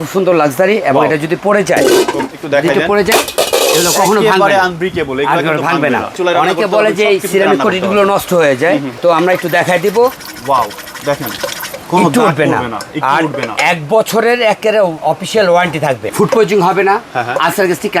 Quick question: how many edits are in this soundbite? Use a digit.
5